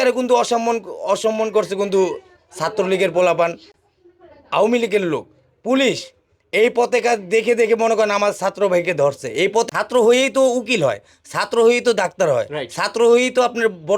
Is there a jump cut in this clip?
yes; 1 cut; at 9.7 s

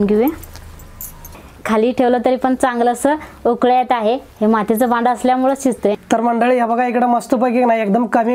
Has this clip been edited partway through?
yes; 2 cuts; at 1.4 s, 5.9 s

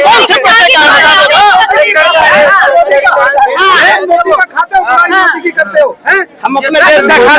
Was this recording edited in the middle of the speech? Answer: no; 0 cuts

